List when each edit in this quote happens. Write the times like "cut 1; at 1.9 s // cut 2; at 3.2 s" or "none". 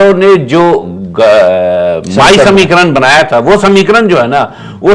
none